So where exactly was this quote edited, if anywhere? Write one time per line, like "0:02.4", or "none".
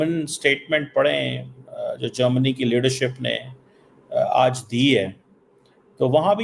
none

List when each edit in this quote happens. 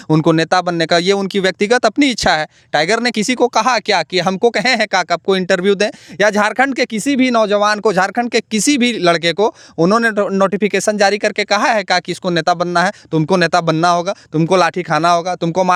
none

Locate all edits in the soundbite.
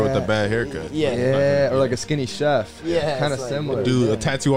none

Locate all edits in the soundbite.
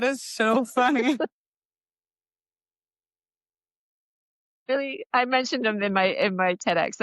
none

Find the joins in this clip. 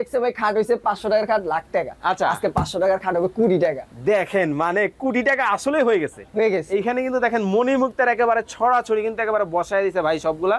none

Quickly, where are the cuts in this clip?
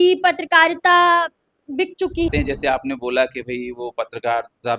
0:02.3

